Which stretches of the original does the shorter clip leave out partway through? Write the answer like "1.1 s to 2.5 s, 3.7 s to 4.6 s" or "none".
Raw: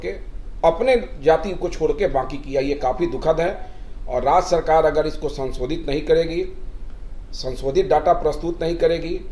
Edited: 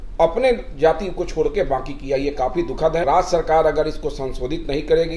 3.5 s to 4.2 s